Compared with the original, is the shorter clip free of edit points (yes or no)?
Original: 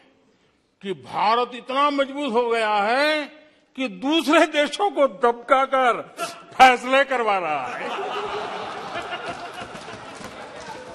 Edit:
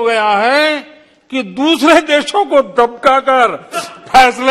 yes